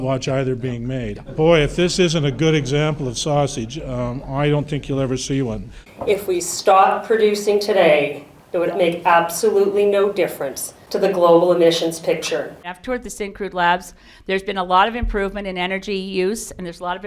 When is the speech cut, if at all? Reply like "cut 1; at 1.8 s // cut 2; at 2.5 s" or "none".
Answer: cut 1; at 5.7 s // cut 2; at 12.6 s